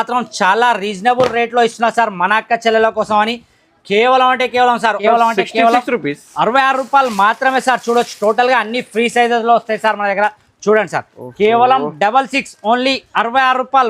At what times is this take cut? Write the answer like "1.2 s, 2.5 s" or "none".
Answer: 5.0 s